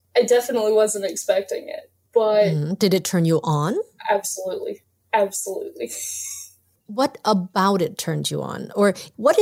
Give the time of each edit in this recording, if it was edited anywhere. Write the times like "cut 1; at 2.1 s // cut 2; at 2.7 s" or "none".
none